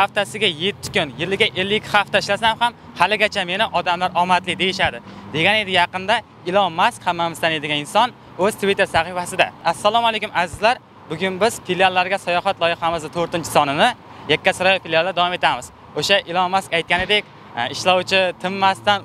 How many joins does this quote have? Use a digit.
0